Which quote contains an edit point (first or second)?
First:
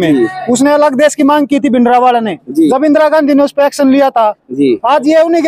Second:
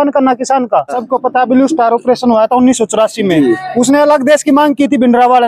second